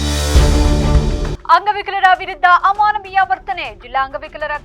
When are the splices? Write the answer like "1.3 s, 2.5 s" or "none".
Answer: 1.3 s